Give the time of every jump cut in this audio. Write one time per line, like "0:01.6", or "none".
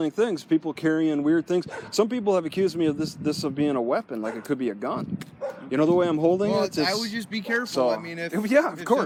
none